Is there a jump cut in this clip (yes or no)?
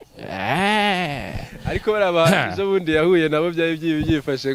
no